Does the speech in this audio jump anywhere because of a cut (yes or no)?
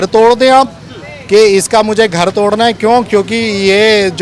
no